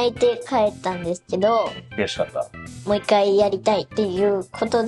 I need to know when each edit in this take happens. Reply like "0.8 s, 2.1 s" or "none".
2.7 s, 3.9 s

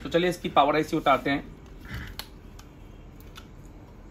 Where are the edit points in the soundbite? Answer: none

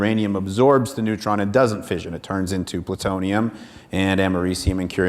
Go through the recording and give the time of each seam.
1.8 s, 3.3 s

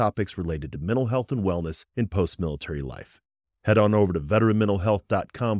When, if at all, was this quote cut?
none

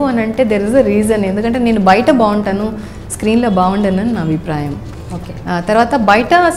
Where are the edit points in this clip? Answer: none

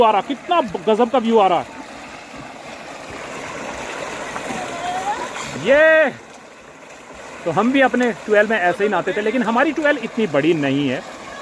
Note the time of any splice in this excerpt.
none

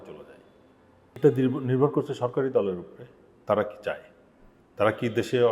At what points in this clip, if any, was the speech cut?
1.2 s

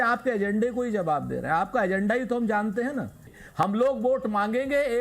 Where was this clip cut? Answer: 3.6 s

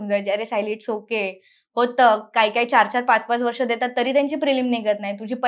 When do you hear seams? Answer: none

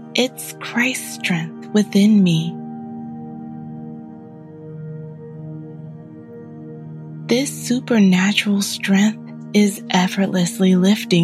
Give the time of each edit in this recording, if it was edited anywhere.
2.8 s, 6.7 s

